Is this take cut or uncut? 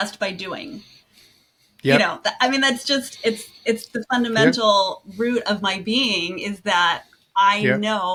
uncut